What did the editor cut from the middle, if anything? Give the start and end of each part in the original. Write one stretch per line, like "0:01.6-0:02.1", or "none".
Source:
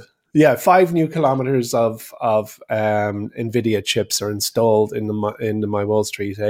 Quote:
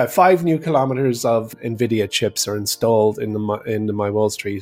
0:02.1-0:03.3